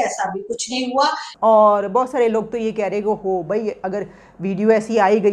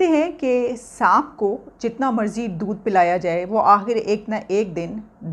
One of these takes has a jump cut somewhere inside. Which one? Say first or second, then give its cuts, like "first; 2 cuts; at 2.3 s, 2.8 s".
first; 1 cut; at 1.3 s